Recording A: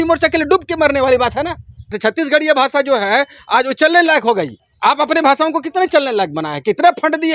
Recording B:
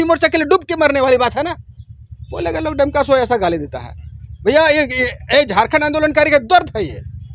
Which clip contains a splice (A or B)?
A